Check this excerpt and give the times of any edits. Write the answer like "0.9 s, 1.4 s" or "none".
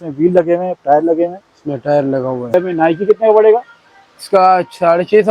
2.5 s